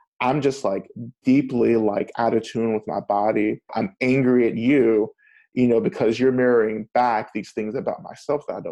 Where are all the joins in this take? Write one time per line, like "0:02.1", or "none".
0:03.7